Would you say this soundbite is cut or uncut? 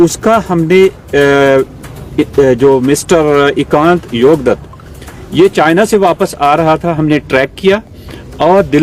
uncut